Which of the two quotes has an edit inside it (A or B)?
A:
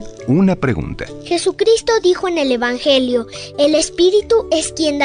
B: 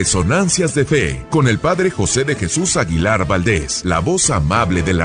B